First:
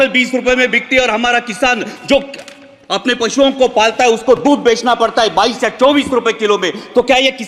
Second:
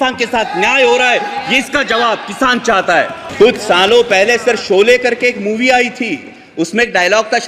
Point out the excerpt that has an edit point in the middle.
second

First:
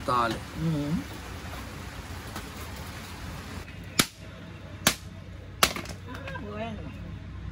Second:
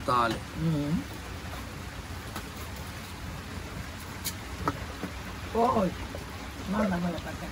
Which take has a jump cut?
first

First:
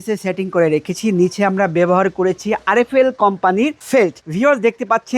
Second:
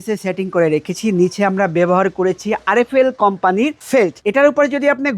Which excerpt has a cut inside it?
second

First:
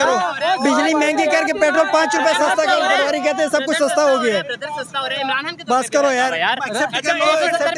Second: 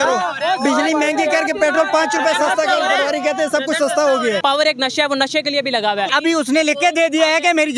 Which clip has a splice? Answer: second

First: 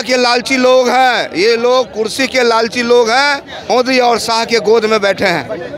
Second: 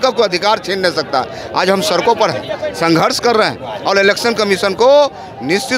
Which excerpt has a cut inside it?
first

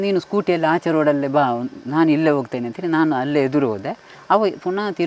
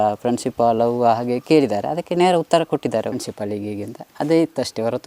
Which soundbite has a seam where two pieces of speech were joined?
second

